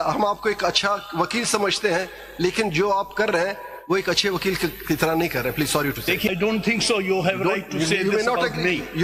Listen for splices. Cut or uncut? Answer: cut